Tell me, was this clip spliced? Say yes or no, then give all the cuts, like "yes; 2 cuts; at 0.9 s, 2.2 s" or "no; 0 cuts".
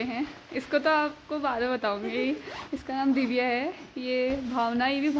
no; 0 cuts